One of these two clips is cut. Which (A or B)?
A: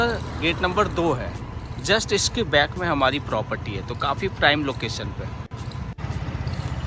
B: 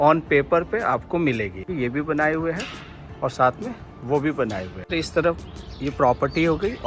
B